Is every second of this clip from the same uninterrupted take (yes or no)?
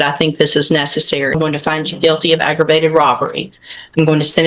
no